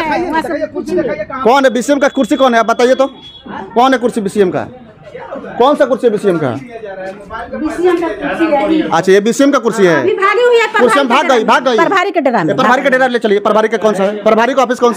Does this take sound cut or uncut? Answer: uncut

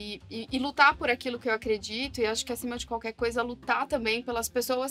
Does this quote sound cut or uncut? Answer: uncut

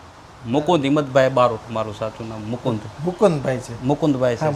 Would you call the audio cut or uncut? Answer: uncut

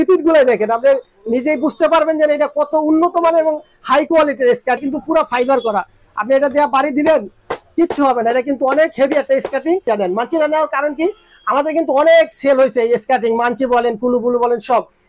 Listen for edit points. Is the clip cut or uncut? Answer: cut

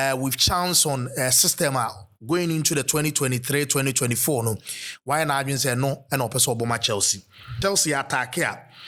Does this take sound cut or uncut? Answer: cut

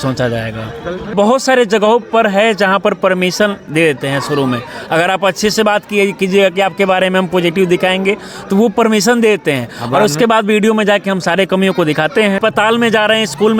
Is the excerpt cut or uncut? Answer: cut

